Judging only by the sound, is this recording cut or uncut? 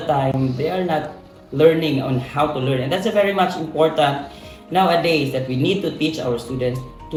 uncut